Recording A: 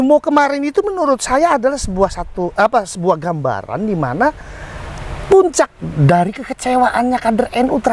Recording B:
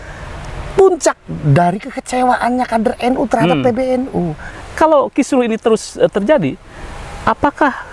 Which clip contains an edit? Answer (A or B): B